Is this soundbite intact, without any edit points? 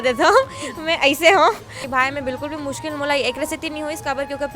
no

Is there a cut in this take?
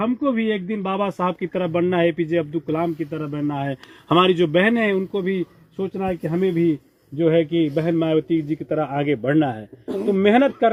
no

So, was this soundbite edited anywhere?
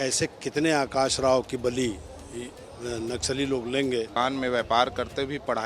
yes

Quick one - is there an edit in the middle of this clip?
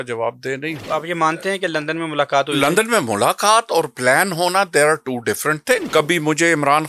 yes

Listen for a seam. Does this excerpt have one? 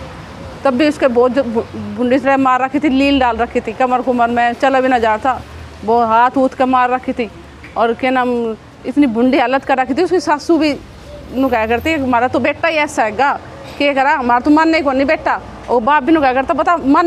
no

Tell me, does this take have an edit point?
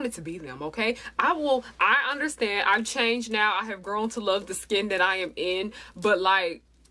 no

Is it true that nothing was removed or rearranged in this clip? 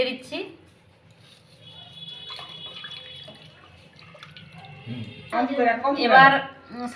yes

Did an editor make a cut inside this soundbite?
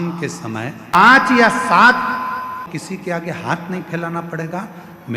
yes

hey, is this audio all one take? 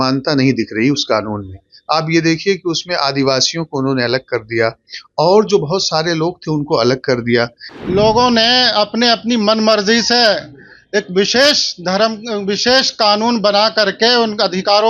no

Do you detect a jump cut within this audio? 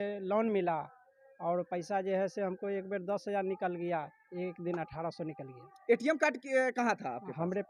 no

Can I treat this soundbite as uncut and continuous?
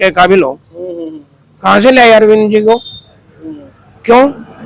yes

